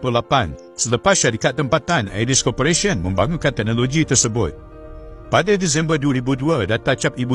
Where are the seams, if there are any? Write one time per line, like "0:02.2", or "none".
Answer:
none